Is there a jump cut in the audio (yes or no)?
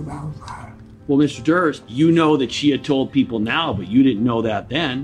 yes